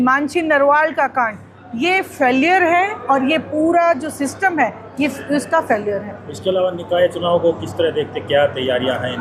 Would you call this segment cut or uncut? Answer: uncut